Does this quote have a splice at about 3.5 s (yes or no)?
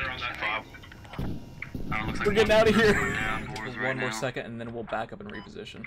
yes